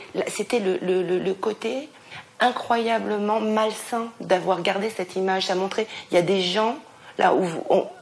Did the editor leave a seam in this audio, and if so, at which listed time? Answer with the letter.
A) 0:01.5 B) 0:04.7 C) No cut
C